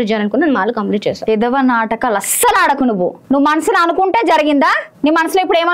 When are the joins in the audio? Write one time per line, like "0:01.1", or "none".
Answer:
0:03.2
0:04.9